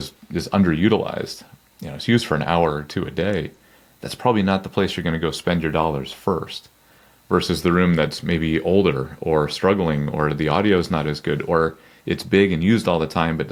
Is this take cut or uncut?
uncut